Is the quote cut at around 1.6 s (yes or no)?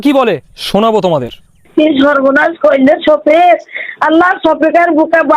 yes